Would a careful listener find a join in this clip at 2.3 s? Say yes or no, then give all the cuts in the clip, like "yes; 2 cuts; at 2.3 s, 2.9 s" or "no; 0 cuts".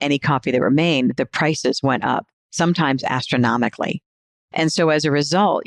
no; 1 cut; at 4.2 s